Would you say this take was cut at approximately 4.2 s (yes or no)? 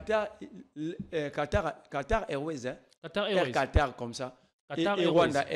no